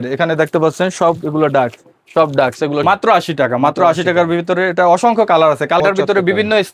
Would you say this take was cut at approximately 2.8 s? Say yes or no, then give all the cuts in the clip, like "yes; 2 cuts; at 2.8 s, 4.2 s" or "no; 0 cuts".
yes; 2 cuts; at 2.8 s, 5.8 s